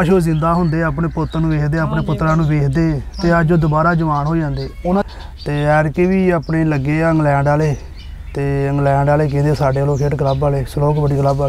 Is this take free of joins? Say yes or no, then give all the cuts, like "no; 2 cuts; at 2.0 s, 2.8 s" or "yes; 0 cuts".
no; 1 cut; at 5.0 s